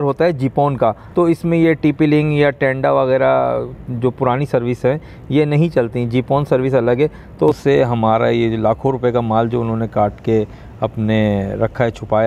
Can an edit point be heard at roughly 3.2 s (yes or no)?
no